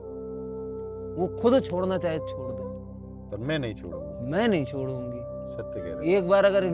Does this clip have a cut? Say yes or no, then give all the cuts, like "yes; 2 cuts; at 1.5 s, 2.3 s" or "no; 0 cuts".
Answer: yes; 1 cut; at 1.0 s